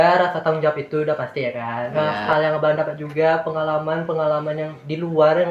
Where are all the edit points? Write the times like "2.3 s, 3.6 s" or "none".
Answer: 1.8 s